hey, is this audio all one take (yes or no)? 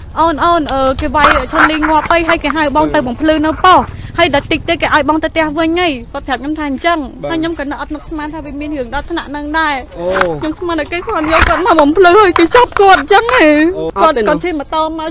no